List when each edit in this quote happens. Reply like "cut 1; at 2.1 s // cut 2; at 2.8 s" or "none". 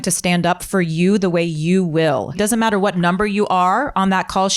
cut 1; at 2.4 s